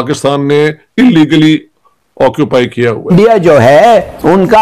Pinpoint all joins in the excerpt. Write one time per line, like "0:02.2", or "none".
0:03.1